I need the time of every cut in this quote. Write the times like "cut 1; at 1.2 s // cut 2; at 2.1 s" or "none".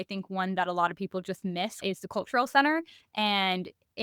cut 1; at 1.8 s